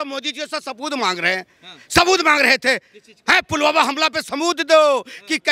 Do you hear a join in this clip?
no; 0 cuts

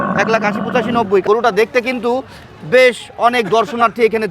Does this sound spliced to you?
yes; 1 cut; at 1.2 s

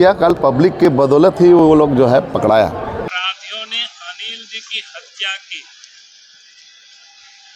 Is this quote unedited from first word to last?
no; 1 cut; at 3.0 s

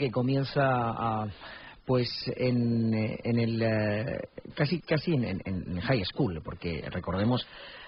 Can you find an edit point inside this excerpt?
yes; 1 cut; at 5.9 s

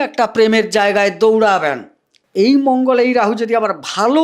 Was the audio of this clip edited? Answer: yes; 1 cut; at 2.2 s

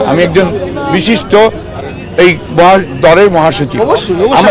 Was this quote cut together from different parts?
no; 0 cuts

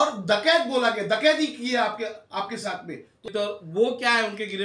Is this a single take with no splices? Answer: no; 1 cut; at 3.3 s

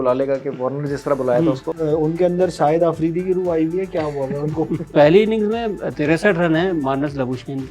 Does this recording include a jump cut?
yes; 2 cuts; at 1.7 s, 4.9 s

